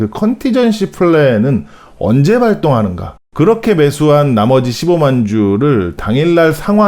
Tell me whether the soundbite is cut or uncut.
cut